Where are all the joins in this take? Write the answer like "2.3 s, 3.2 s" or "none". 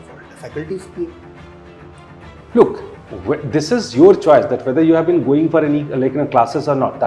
none